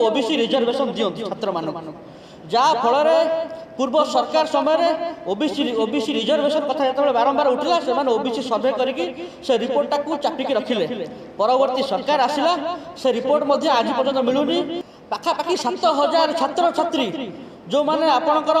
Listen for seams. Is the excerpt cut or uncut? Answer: cut